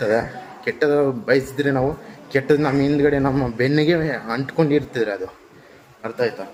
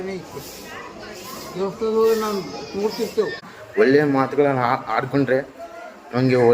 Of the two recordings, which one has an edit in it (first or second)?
second